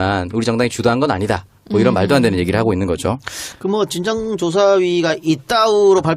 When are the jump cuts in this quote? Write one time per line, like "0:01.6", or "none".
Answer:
0:03.9